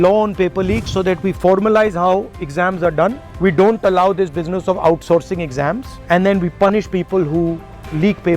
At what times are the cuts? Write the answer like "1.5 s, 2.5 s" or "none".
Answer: none